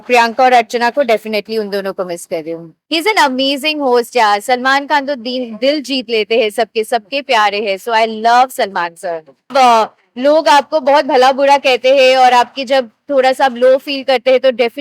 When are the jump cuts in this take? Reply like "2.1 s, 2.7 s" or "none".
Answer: 2.8 s, 9.5 s